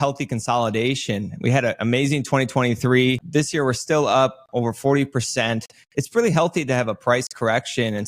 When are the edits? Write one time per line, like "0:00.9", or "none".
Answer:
0:03.2